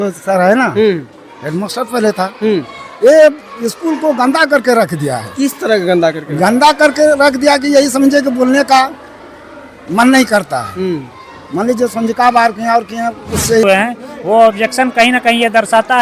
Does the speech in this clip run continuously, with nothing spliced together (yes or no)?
no